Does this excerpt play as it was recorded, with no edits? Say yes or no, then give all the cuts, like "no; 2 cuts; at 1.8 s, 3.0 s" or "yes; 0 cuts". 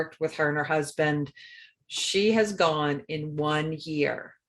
no; 1 cut; at 1.7 s